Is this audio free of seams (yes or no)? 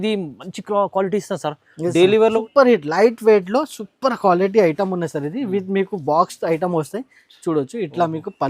no